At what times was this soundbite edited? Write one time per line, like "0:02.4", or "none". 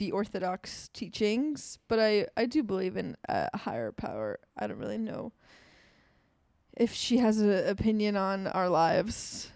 none